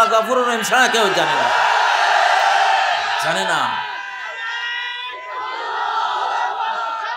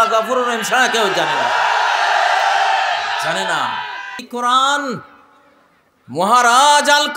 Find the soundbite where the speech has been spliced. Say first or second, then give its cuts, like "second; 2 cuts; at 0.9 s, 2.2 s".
second; 1 cut; at 4.2 s